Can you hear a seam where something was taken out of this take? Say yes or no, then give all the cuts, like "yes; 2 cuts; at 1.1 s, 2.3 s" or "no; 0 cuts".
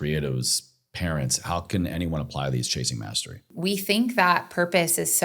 yes; 1 cut; at 3.5 s